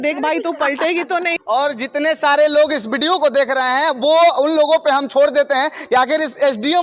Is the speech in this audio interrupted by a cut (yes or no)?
no